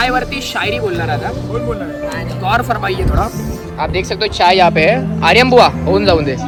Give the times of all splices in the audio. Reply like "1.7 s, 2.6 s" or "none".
none